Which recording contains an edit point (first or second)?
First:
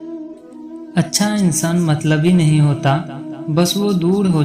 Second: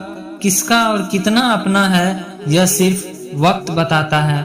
first